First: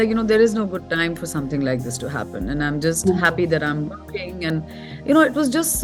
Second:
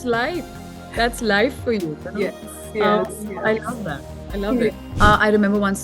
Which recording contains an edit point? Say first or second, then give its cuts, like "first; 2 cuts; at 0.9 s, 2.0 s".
second; 1 cut; at 4.8 s